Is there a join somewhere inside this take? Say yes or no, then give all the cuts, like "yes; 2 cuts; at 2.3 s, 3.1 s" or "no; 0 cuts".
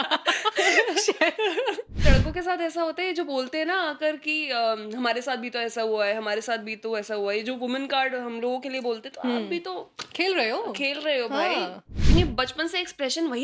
yes; 2 cuts; at 2.0 s, 12.0 s